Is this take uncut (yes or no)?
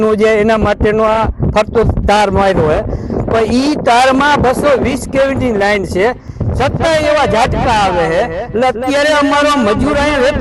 yes